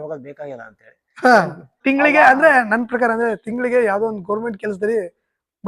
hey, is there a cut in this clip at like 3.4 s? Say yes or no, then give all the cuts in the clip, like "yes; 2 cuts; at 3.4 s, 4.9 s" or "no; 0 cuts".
no; 1 cut; at 1.8 s